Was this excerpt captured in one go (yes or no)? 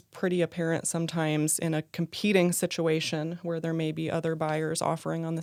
yes